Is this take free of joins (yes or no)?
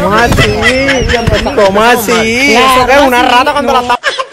yes